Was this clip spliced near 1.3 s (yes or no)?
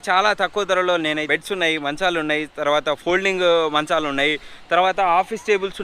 yes